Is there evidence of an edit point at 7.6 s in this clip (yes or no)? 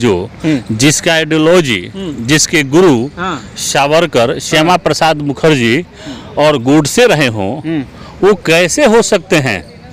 no